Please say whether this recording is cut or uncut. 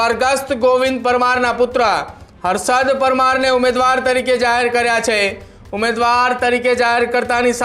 uncut